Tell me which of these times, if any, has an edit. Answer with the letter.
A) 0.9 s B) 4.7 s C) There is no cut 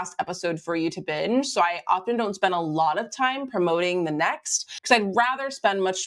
B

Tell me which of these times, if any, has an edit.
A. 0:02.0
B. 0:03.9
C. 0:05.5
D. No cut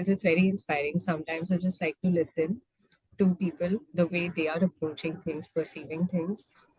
D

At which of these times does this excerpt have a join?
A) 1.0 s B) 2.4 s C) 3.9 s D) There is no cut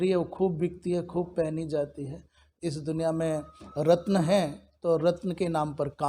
B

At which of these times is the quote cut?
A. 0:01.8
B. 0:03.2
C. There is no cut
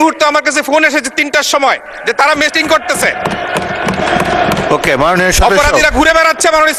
C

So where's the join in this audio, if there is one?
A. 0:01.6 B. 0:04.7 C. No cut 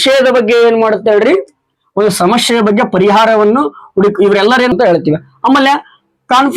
B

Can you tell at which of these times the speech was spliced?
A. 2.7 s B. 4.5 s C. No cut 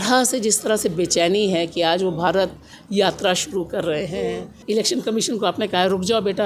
B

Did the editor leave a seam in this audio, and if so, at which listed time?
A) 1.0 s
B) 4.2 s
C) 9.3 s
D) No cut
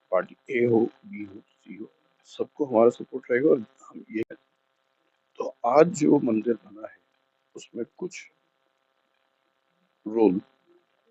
B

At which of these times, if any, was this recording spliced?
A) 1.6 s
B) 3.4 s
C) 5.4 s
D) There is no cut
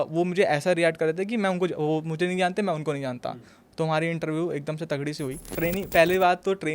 C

